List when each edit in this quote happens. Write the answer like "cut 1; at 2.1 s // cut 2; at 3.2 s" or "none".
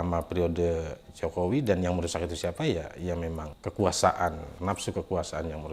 cut 1; at 3.5 s // cut 2; at 4.5 s